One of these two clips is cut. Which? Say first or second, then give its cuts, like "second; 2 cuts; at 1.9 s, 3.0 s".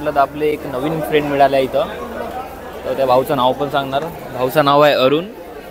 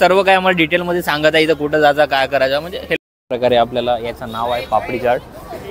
second; 1 cut; at 3.0 s